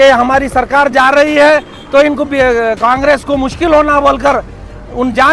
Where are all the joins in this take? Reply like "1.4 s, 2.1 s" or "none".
none